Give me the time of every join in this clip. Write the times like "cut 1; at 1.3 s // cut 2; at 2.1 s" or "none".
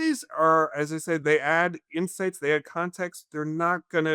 cut 1; at 1.2 s